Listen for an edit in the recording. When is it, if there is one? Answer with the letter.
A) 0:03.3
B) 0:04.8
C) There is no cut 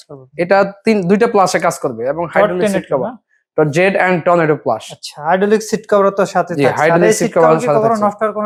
C